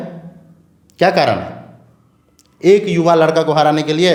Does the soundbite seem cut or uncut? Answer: uncut